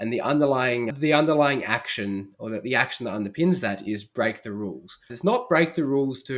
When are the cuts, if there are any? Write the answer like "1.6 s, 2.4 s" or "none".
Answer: 0.9 s, 5.0 s